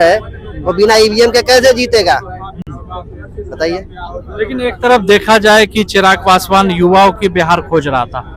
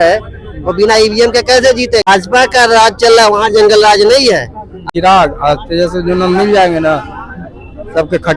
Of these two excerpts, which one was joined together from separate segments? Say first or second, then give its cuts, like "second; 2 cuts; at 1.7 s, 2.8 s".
second; 2 cuts; at 2.0 s, 4.8 s